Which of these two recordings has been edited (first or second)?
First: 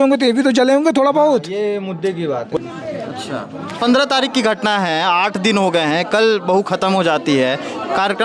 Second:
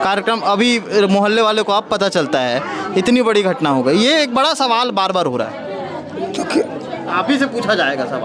first